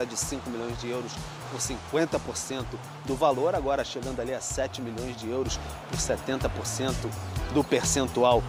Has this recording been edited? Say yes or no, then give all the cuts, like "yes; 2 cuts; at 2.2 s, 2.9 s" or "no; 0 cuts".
no; 0 cuts